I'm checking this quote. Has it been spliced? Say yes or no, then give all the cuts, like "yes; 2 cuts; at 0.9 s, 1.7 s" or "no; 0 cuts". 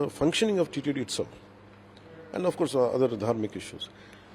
no; 0 cuts